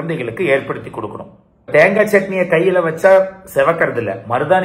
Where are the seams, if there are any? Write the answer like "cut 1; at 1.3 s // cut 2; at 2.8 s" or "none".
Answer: cut 1; at 1.7 s